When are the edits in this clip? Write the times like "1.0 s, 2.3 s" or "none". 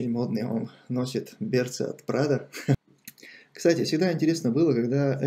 2.8 s